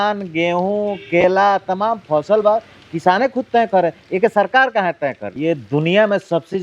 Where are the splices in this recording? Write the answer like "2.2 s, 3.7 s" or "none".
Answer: 5.3 s